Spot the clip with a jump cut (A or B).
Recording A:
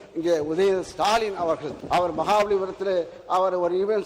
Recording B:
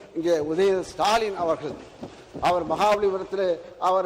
A